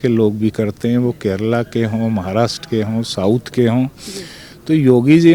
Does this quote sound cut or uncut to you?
uncut